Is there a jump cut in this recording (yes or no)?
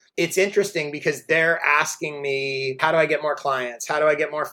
yes